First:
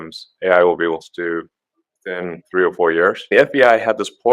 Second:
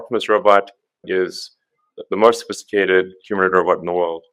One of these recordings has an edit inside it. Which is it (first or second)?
first